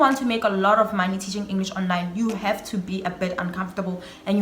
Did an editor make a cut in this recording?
no; 0 cuts

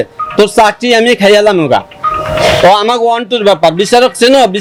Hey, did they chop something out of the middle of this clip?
no; 0 cuts

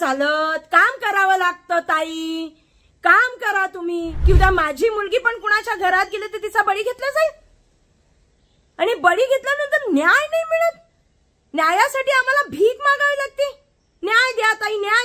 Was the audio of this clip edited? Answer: yes; 1 cut; at 4.1 s

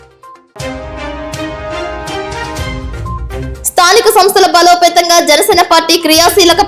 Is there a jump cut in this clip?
yes; 2 cuts; at 2.3 s, 3.6 s

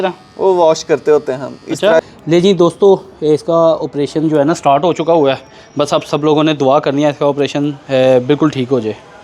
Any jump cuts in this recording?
yes; 1 cut; at 2.0 s

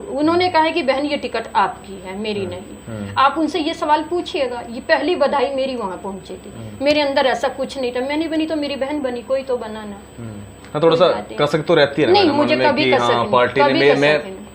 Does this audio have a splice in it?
no; 0 cuts

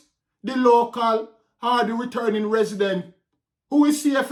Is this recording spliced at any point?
no; 0 cuts

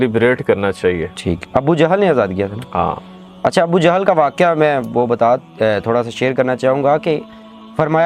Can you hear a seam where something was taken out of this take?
no; 0 cuts

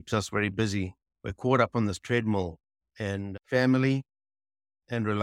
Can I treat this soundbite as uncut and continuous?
yes; 0 cuts

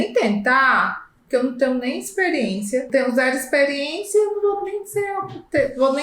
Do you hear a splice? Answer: yes; 1 cut; at 2.9 s

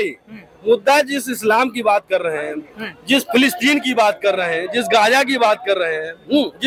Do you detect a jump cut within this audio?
no; 0 cuts

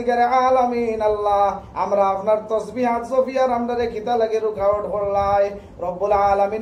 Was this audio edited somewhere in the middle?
no; 0 cuts

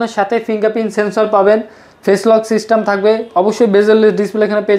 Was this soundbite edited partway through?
no; 0 cuts

